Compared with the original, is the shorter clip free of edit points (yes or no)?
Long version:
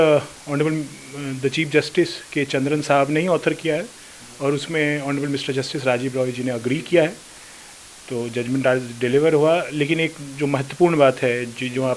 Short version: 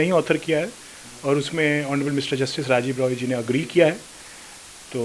yes